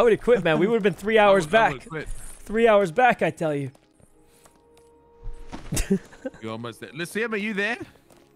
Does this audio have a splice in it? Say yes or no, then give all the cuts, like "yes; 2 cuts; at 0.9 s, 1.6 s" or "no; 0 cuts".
no; 0 cuts